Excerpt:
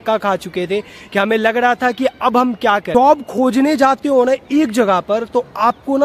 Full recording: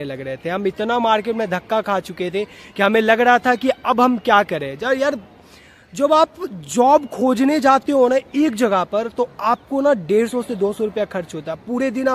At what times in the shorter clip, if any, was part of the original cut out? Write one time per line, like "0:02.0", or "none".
0:02.9